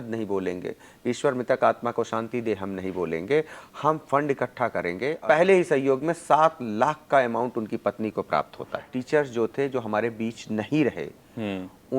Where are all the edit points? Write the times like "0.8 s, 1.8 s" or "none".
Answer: 5.2 s, 9.0 s